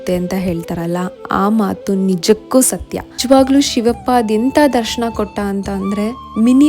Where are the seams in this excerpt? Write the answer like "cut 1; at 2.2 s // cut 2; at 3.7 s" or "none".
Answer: cut 1; at 3.2 s